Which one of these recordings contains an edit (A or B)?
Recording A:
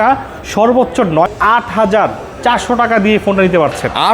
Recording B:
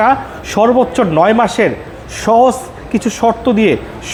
A